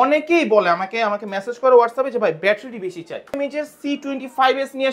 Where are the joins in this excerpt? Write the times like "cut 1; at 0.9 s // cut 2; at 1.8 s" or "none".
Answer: cut 1; at 3.4 s